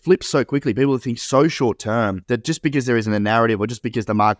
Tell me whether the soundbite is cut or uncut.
cut